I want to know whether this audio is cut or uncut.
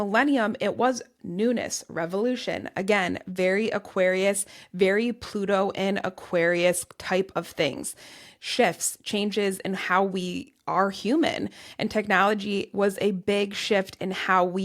uncut